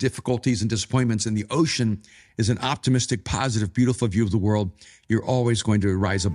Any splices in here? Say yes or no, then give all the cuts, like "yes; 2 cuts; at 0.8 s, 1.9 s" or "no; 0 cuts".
no; 0 cuts